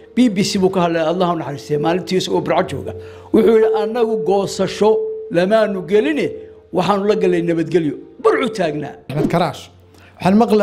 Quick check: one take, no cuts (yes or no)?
no